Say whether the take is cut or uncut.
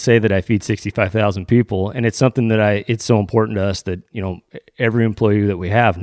uncut